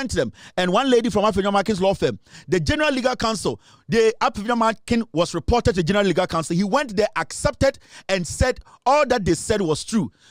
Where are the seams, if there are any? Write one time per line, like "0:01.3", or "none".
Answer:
none